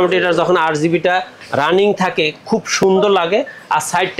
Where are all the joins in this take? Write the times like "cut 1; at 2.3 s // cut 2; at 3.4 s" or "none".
none